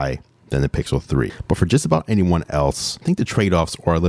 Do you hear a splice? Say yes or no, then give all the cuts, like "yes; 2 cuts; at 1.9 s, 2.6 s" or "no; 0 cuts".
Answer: yes; 1 cut; at 1.4 s